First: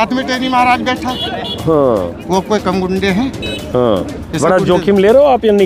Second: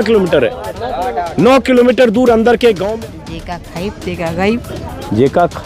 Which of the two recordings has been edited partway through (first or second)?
second